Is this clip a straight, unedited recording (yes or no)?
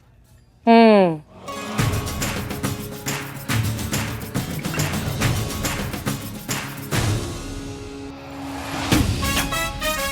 yes